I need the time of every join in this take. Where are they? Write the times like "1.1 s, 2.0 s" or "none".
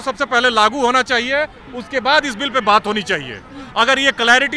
none